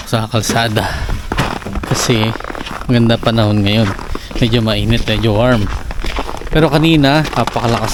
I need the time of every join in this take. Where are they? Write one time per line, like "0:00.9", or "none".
none